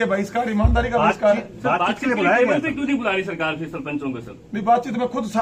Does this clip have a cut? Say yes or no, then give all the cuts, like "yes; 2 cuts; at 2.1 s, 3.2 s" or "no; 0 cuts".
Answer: no; 0 cuts